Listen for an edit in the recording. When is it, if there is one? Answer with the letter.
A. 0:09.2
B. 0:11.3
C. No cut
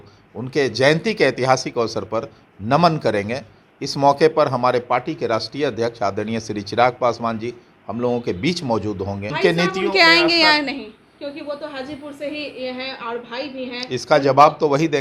A